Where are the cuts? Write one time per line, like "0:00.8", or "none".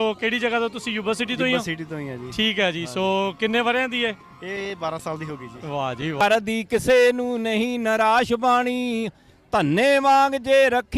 0:06.2

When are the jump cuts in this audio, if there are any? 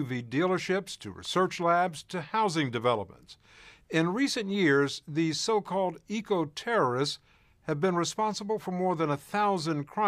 none

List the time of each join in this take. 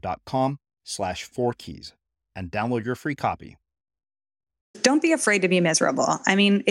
0:04.8

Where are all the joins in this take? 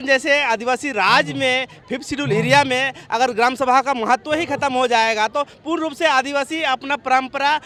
none

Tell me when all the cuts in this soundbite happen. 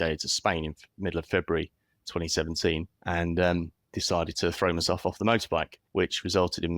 0:02.9
0:05.8

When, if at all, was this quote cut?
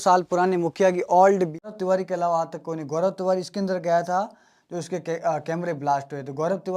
0:01.6

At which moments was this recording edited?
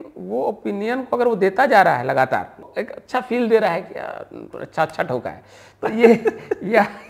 0:02.7

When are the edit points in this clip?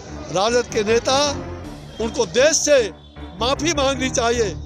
none

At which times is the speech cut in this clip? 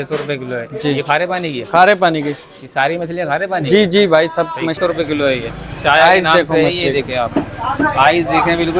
0:04.8

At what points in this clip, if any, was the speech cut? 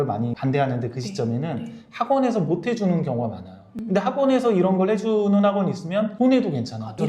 0:03.7

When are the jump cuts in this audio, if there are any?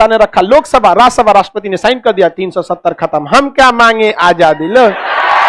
none

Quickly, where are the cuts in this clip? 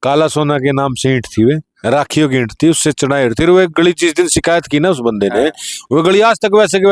none

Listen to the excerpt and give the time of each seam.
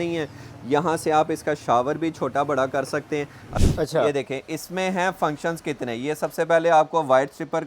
0:03.5

